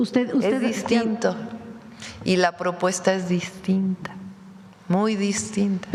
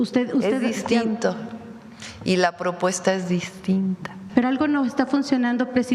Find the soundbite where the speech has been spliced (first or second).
second